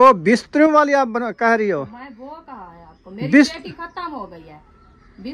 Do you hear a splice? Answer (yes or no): no